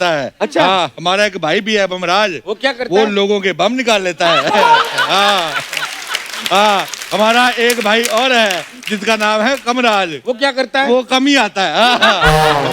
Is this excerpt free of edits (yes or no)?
yes